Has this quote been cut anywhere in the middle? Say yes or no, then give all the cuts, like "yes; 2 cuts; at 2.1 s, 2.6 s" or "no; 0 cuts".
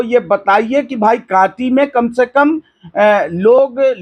no; 0 cuts